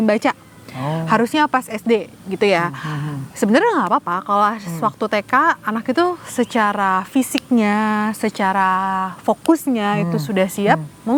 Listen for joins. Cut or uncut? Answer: uncut